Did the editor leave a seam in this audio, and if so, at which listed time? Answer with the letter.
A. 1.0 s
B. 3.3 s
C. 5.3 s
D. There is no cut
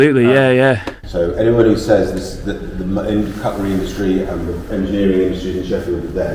A